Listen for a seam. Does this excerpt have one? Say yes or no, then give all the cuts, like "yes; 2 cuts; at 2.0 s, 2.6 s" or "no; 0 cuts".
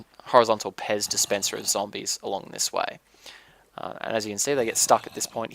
yes; 1 cut; at 4.2 s